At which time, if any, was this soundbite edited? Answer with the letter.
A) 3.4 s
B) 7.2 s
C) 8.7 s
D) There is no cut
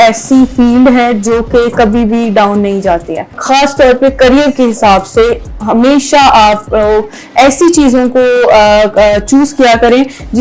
A